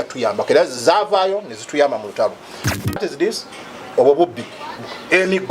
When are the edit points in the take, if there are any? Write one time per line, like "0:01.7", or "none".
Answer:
0:03.0